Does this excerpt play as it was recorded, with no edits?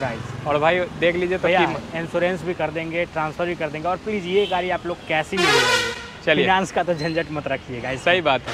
yes; 0 cuts

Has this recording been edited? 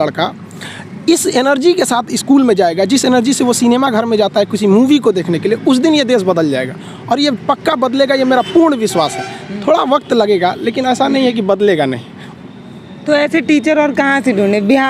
no; 0 cuts

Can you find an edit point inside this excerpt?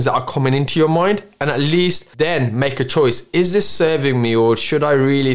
yes; 1 cut; at 2.0 s

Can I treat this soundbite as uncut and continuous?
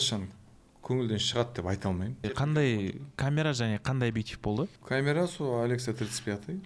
no; 2 cuts; at 2.1 s, 4.8 s

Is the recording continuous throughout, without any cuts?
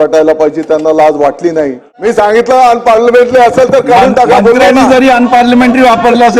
no; 1 cut; at 1.9 s

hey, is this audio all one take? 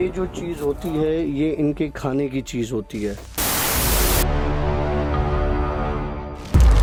yes; 0 cuts

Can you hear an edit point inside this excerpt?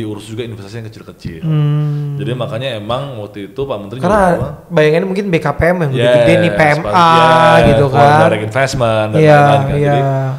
no; 0 cuts

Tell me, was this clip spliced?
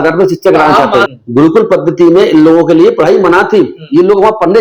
yes; 1 cut; at 1.1 s

